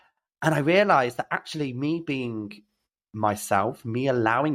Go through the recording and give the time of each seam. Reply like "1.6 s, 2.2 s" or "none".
none